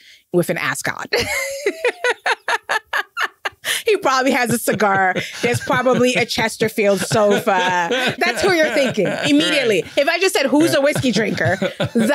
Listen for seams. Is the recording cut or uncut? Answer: uncut